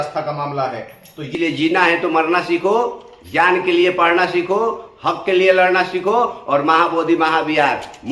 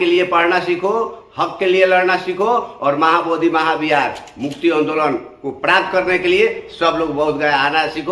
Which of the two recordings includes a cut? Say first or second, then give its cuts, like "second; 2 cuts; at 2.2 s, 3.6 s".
first; 1 cut; at 1.3 s